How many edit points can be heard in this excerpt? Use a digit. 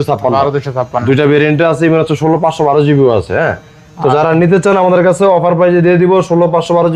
0